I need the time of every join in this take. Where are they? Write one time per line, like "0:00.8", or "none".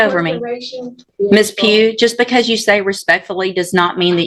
0:01.0